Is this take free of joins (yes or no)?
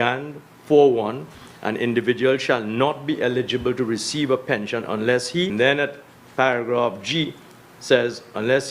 no